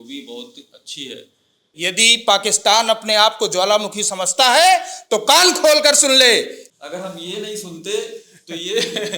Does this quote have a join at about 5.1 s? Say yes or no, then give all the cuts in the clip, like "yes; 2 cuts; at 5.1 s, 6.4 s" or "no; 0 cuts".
no; 2 cuts; at 1.7 s, 6.6 s